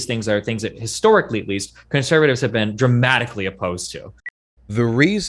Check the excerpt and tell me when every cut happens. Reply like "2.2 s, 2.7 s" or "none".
4.3 s